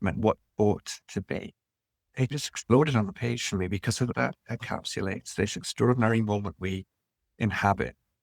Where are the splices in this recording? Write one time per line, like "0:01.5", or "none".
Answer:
0:02.2
0:04.1